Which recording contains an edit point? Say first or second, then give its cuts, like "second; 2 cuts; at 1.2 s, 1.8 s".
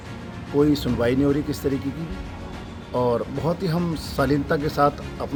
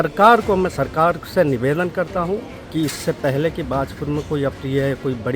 second; 1 cut; at 2.6 s